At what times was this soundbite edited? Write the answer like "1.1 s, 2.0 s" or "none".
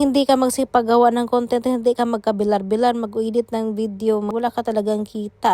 4.3 s